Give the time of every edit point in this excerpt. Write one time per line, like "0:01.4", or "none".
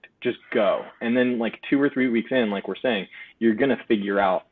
none